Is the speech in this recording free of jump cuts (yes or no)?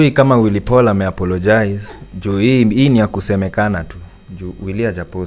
yes